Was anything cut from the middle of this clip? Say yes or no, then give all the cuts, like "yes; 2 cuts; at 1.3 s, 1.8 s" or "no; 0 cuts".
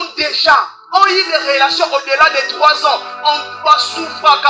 no; 0 cuts